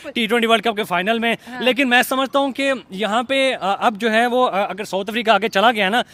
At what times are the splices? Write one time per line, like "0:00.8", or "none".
none